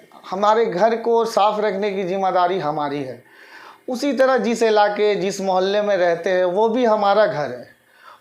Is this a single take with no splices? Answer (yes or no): yes